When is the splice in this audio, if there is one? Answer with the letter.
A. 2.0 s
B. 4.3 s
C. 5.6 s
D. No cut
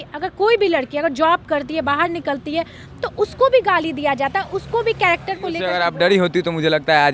C